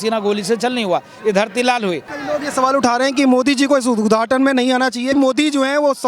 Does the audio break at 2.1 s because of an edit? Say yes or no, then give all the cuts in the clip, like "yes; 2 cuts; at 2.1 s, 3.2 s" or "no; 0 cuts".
yes; 2 cuts; at 2.1 s, 5.1 s